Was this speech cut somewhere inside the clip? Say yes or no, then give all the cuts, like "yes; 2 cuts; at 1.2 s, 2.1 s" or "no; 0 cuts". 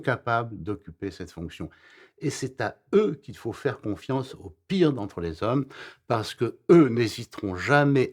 no; 0 cuts